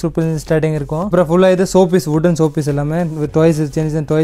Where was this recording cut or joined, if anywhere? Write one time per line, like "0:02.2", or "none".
0:01.1